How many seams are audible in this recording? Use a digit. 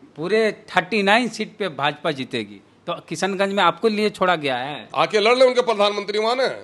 1